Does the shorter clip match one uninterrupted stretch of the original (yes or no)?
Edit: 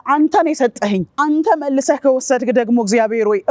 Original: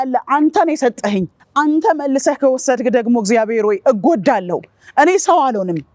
no